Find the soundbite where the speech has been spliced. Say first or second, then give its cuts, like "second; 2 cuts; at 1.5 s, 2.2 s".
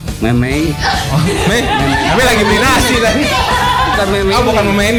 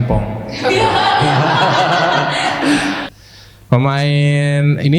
second; 1 cut; at 3.1 s